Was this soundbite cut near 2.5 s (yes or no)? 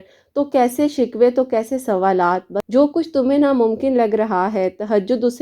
yes